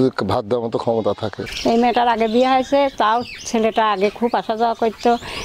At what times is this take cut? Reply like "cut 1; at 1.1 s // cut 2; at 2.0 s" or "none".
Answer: cut 1; at 1.4 s